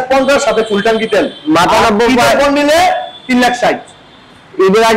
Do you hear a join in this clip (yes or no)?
no